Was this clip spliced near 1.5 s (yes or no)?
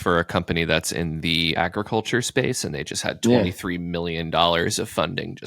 yes